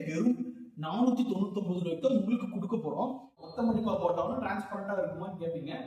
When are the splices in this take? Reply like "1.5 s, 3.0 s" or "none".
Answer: 3.4 s